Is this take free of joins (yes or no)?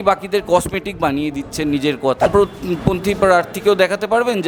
no